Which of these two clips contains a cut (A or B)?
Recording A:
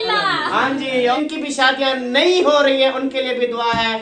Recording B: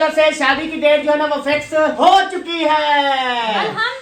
A